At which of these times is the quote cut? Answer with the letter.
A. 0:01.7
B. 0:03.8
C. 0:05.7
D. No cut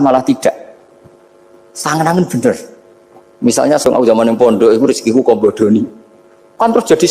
B